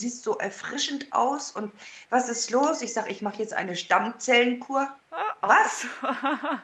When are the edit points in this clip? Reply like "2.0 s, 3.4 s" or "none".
none